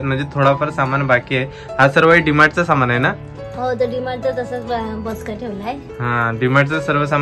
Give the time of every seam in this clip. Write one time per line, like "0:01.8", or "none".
none